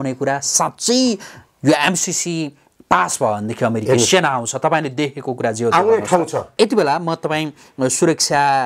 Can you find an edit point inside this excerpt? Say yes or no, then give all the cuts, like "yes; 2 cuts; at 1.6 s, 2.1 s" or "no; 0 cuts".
yes; 1 cut; at 6.4 s